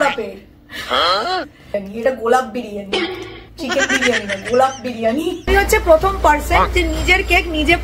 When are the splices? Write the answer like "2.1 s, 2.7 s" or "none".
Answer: 5.4 s